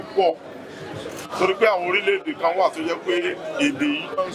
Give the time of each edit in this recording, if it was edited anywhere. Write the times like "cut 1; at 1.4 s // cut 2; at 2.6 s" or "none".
none